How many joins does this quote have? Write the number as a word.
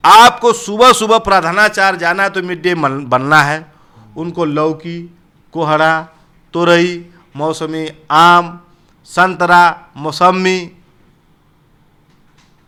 zero